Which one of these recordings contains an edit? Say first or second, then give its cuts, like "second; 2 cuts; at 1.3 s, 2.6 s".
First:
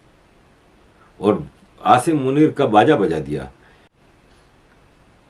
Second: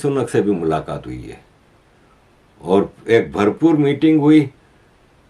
first; 1 cut; at 4.1 s